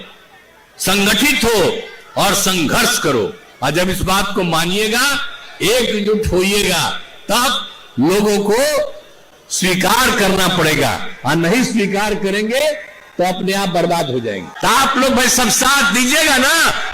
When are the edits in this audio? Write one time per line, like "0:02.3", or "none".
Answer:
0:14.5